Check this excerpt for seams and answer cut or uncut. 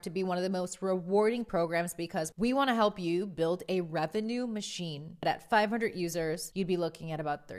cut